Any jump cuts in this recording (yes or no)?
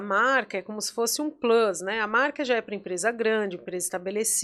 no